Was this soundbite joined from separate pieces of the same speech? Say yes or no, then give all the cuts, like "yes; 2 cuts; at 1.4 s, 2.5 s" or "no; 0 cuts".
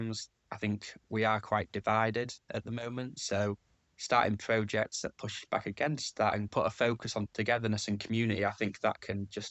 yes; 1 cut; at 6.5 s